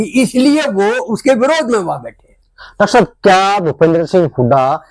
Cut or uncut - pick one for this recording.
uncut